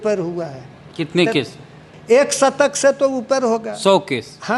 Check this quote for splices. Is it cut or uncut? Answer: cut